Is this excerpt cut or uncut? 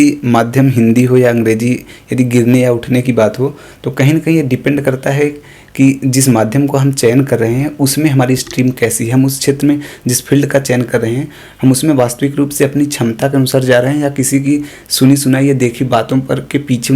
uncut